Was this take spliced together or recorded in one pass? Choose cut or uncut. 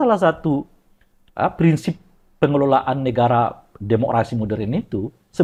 uncut